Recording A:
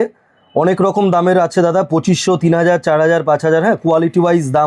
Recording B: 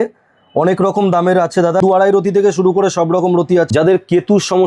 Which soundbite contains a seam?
B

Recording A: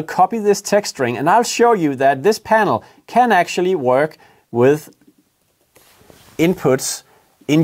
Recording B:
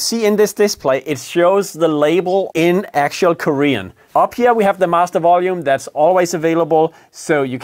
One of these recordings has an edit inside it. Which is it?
B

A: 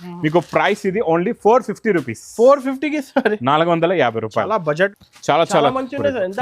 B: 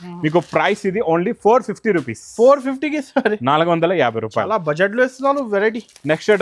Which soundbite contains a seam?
A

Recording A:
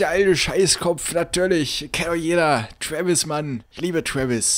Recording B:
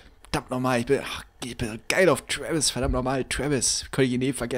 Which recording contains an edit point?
A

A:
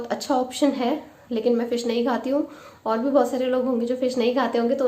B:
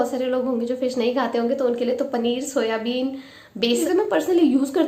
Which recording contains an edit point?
B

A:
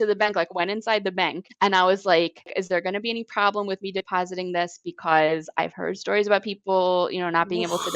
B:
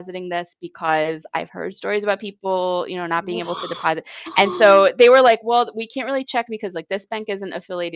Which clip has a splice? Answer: A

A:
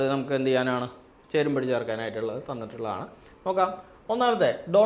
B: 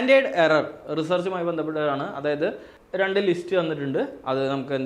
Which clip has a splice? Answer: B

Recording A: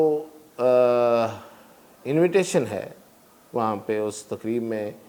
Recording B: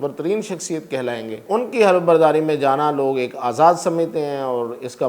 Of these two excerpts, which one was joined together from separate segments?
B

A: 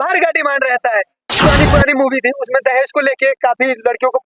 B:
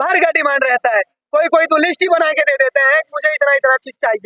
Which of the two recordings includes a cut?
A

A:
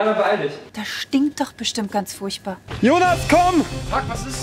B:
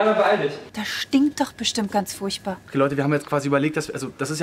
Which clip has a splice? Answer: A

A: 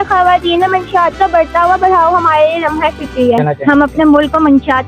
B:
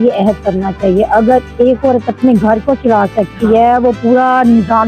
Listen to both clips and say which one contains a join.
A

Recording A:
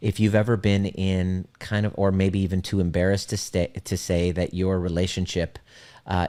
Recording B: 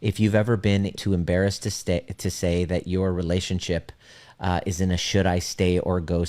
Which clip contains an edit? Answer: B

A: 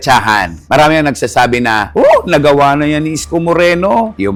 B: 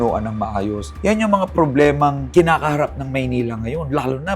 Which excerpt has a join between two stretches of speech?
B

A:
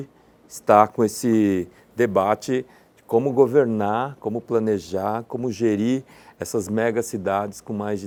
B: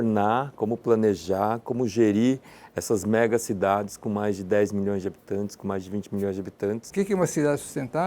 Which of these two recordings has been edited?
B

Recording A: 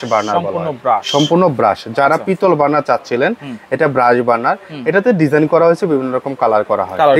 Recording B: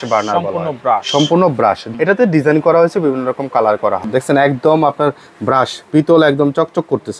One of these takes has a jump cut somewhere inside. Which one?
B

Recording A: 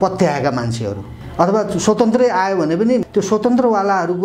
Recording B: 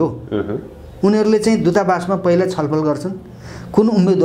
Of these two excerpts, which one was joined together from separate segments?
A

